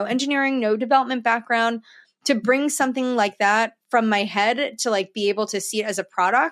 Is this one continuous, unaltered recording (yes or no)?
yes